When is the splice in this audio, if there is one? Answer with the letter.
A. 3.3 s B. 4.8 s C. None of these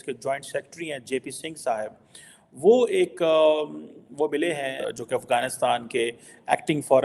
B